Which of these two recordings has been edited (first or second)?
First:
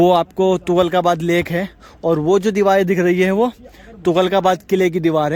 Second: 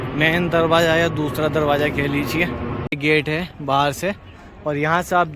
second